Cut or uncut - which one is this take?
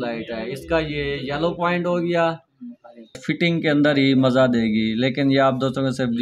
cut